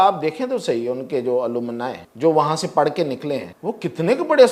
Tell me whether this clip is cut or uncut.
cut